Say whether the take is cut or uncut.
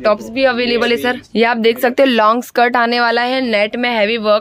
cut